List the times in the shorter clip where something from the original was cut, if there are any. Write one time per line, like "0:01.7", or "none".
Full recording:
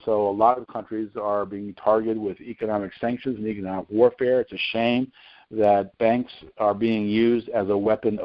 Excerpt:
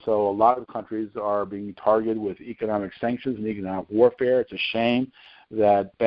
none